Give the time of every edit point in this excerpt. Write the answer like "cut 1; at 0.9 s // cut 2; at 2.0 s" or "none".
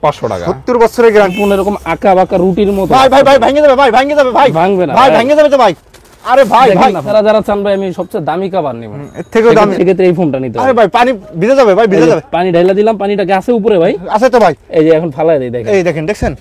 cut 1; at 1.3 s // cut 2; at 7.1 s // cut 3; at 9.7 s